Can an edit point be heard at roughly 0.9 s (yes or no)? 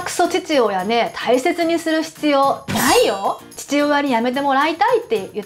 no